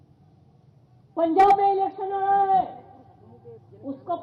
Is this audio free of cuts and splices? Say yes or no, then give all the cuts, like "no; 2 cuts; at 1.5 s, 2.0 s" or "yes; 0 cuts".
no; 1 cut; at 2.7 s